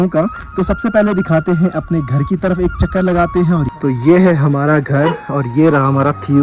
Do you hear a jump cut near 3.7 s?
yes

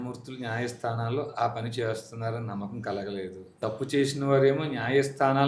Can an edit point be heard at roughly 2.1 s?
no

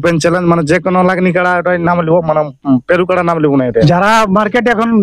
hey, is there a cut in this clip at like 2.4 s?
no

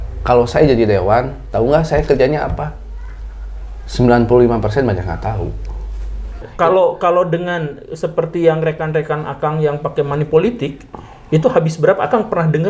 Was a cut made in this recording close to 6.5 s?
yes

